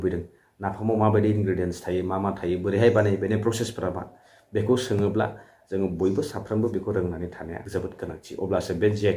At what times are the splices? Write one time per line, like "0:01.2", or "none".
none